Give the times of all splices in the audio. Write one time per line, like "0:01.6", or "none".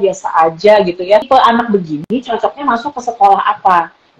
0:01.3